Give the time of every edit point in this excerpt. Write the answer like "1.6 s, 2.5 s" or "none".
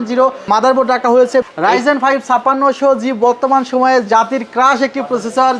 1.5 s